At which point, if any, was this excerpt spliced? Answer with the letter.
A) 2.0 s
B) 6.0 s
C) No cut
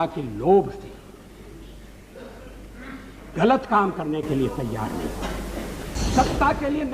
B